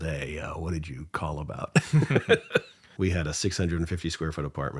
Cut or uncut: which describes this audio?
cut